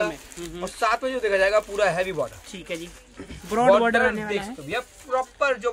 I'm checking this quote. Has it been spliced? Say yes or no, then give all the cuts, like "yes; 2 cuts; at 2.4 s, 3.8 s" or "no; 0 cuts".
no; 0 cuts